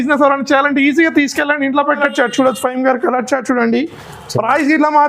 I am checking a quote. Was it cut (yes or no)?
yes